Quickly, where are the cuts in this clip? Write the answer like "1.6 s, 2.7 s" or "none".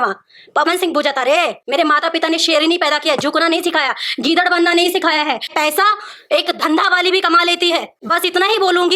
1.6 s, 5.5 s, 8.0 s